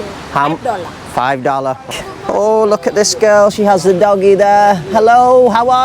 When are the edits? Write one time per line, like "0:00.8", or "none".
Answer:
0:01.9